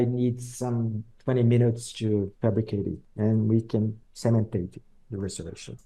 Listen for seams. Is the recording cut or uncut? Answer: cut